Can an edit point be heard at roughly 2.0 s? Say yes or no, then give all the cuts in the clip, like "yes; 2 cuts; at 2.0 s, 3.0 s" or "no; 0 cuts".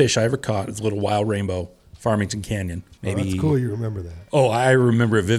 no; 0 cuts